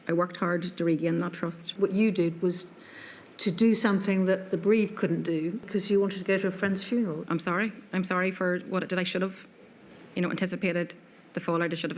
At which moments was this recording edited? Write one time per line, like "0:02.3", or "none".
0:01.7
0:05.6
0:07.2